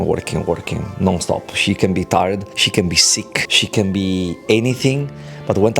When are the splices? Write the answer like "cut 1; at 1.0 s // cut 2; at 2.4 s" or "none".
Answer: cut 1; at 2.6 s // cut 2; at 3.5 s